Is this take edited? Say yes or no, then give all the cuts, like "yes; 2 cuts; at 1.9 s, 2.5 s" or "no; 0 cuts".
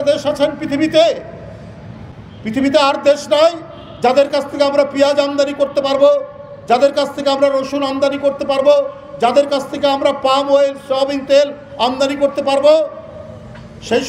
no; 0 cuts